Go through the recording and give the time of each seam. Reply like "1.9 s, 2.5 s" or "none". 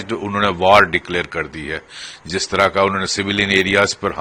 none